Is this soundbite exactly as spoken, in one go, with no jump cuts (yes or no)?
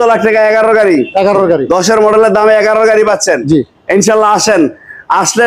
yes